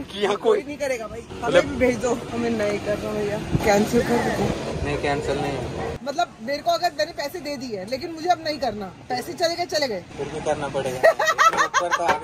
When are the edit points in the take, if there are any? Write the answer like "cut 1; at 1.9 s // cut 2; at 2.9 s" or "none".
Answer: cut 1; at 1.3 s // cut 2; at 2.3 s // cut 3; at 6.0 s

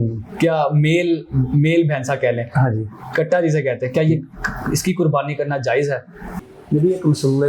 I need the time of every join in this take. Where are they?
cut 1; at 6.5 s

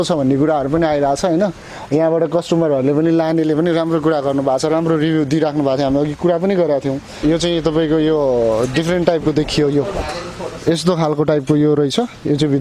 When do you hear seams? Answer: cut 1; at 7.1 s

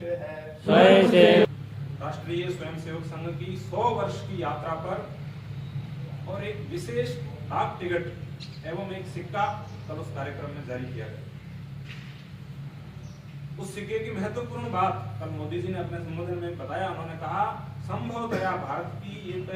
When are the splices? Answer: cut 1; at 1.5 s

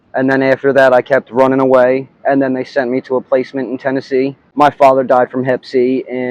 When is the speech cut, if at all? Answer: cut 1; at 4.4 s

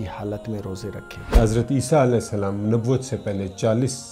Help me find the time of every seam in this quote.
cut 1; at 1.4 s

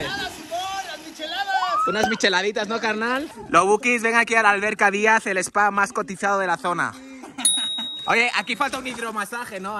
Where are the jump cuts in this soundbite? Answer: cut 1; at 3.4 s

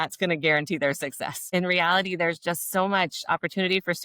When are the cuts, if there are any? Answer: cut 1; at 1.4 s

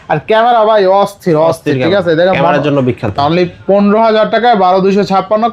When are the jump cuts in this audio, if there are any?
cut 1; at 3.1 s

